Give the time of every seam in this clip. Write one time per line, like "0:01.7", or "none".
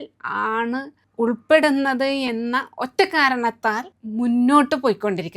0:01.0
0:03.9